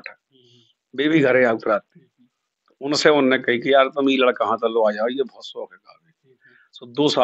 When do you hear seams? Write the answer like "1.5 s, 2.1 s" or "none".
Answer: none